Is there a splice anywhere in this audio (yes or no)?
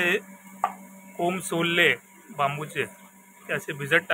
no